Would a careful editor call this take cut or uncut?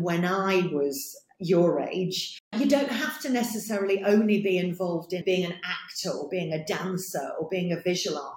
cut